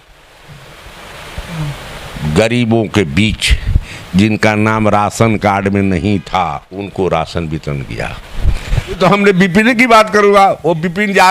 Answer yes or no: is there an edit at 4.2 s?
no